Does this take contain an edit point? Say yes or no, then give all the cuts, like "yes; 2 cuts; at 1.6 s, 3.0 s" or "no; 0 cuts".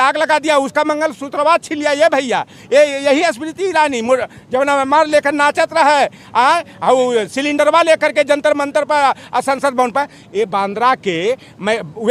no; 0 cuts